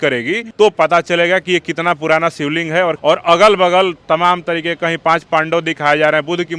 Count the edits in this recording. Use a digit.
1